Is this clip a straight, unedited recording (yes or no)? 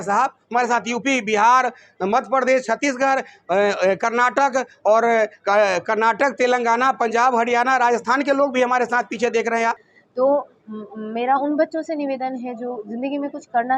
no